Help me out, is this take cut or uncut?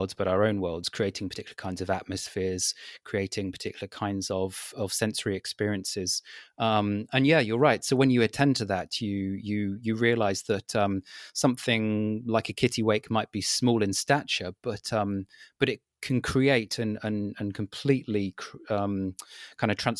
uncut